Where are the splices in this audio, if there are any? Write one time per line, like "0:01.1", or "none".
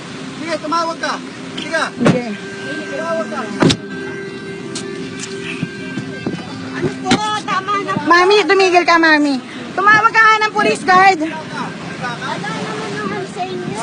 0:01.6